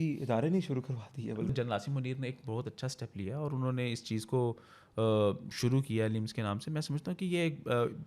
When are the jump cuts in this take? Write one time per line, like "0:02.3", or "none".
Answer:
0:01.5